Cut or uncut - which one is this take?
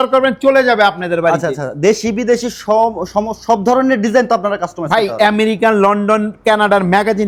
uncut